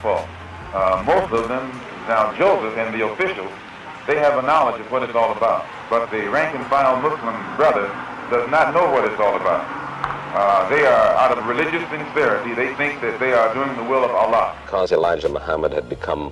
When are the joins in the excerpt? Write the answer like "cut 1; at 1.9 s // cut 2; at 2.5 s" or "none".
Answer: cut 1; at 14.7 s